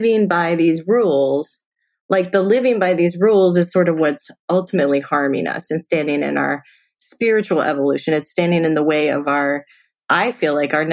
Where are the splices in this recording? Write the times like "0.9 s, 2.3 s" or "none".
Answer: 10.0 s